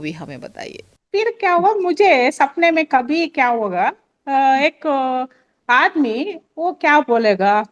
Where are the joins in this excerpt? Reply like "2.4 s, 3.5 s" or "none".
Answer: none